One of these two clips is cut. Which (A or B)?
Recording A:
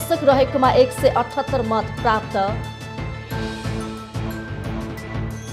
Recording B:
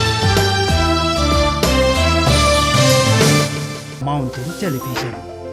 B